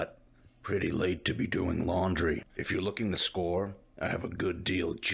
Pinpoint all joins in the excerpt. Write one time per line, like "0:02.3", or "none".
0:02.5